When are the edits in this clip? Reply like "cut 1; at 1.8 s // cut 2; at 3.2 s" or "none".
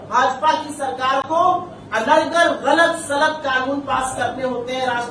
none